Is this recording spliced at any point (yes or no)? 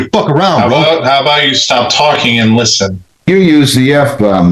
yes